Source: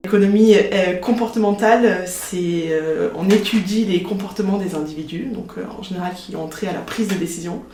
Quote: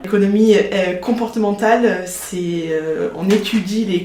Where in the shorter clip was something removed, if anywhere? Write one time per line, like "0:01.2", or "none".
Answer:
none

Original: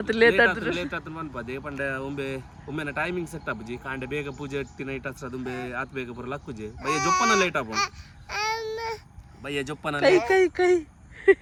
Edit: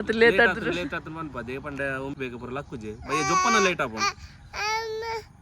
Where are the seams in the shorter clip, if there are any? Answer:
0:02.1

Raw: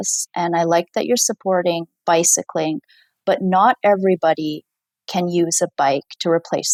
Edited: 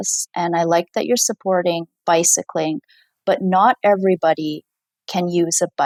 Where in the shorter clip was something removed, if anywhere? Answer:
none

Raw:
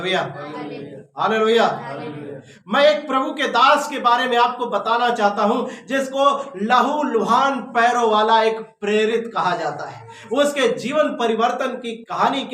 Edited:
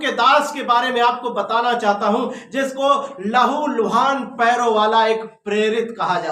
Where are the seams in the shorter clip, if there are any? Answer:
none

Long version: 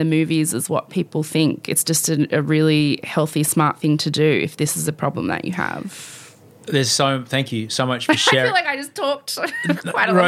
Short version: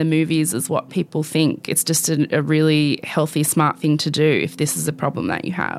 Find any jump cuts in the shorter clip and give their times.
none

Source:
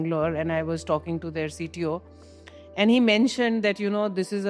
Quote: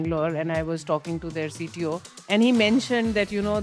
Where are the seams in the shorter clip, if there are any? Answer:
0:02.1

